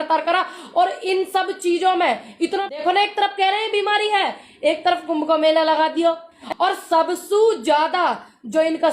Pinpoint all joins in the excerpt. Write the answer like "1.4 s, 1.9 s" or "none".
2.6 s, 6.4 s